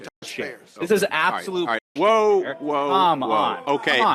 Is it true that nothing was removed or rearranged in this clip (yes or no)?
yes